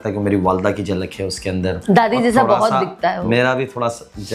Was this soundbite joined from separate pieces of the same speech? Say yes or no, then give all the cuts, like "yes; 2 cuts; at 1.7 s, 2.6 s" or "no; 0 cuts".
no; 0 cuts